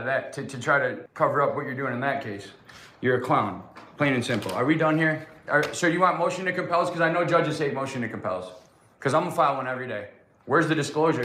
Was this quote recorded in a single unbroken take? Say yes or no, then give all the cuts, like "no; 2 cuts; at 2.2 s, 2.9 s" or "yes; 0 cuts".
no; 1 cut; at 1.0 s